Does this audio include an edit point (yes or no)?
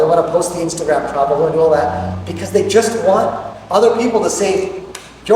no